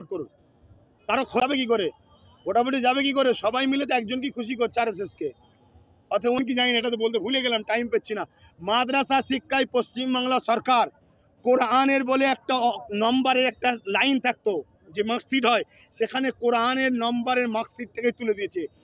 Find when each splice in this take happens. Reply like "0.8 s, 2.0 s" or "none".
1.4 s, 6.4 s